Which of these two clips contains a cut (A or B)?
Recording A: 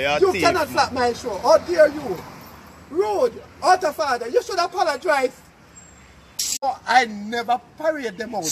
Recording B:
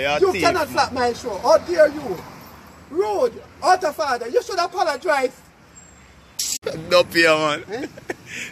B